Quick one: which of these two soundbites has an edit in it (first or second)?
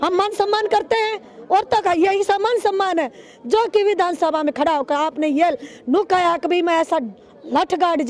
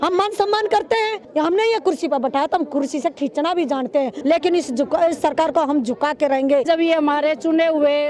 second